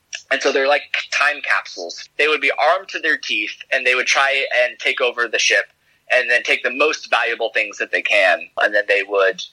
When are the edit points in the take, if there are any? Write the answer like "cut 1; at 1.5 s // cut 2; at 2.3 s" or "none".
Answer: cut 1; at 1.9 s // cut 2; at 8.6 s